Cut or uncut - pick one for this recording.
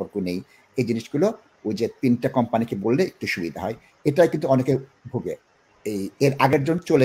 uncut